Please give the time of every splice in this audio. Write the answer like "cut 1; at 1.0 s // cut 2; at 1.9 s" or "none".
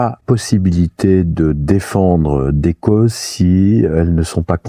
none